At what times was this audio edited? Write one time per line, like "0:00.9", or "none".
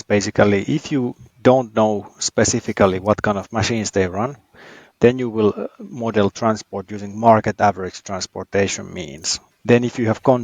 0:01.2
0:09.5